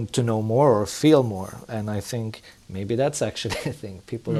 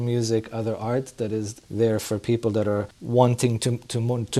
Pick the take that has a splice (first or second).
second